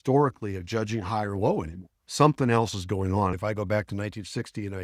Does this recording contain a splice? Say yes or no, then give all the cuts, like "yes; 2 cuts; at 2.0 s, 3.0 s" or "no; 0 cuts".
yes; 1 cut; at 3.3 s